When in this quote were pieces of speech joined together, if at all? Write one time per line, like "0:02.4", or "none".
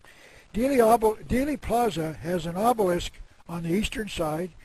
0:03.6